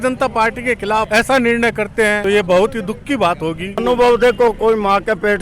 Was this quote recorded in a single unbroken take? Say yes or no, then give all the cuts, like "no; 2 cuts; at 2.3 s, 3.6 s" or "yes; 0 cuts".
no; 3 cuts; at 1.1 s, 2.2 s, 3.8 s